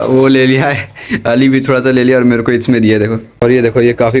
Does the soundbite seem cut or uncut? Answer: cut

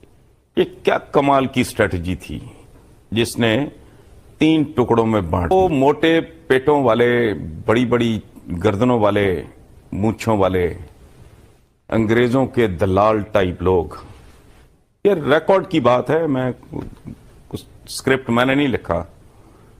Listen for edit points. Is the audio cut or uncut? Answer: cut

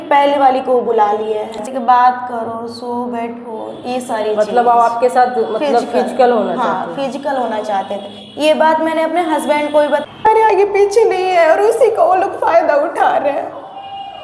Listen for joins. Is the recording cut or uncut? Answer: cut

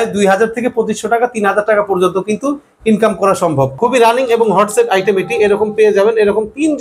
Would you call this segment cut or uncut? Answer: cut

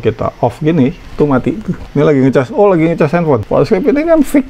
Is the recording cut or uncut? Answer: cut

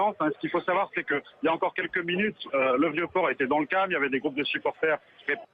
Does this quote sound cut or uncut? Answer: cut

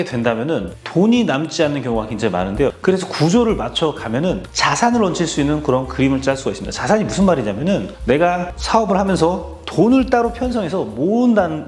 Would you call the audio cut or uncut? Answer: uncut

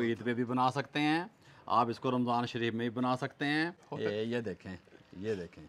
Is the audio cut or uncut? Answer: cut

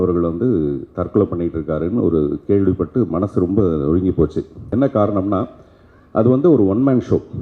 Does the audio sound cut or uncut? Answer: cut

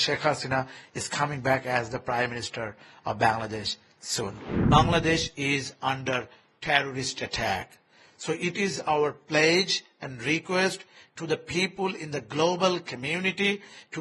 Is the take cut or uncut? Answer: cut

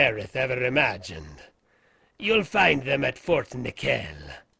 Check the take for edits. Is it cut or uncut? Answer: uncut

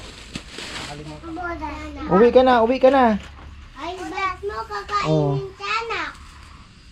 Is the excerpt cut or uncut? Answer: cut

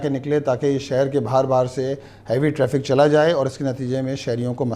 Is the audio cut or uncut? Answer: uncut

